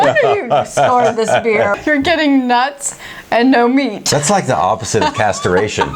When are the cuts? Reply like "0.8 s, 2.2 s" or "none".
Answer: 1.8 s, 4.0 s